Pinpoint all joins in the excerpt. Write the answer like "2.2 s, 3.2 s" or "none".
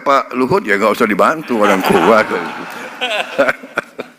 none